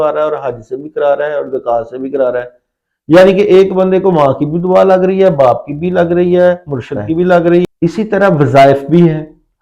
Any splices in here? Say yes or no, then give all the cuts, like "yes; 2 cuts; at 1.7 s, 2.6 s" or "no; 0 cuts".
yes; 1 cut; at 7.6 s